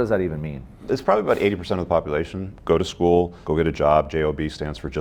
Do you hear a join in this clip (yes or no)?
yes